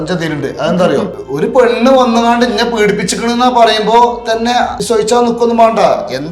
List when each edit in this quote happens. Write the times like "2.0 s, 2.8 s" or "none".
1.2 s, 4.8 s